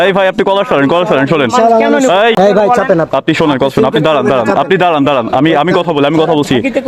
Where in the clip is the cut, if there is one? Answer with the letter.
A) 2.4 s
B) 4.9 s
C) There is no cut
A